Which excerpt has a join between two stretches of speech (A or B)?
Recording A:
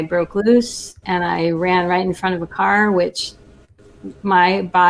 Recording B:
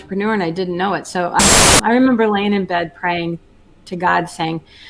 B